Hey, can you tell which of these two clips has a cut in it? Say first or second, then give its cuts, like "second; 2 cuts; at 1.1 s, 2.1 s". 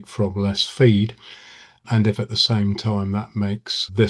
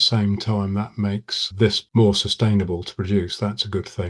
first; 1 cut; at 1.2 s